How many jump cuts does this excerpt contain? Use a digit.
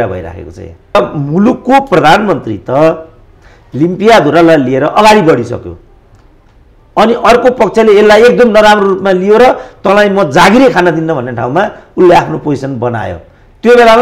1